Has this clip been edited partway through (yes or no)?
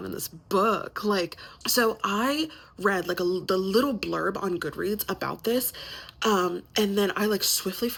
no